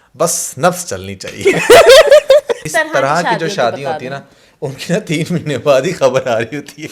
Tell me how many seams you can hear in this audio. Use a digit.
1